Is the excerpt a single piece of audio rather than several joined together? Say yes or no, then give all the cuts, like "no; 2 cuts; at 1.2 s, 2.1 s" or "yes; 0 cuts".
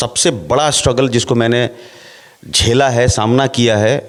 yes; 0 cuts